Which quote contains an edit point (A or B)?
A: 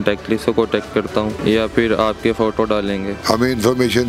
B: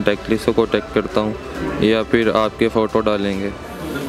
A